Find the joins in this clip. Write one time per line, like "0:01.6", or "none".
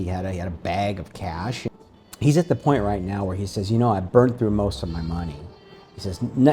0:01.7